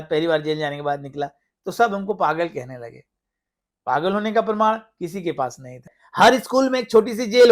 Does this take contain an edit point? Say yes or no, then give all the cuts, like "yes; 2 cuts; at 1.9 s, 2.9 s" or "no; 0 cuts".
yes; 1 cut; at 6.0 s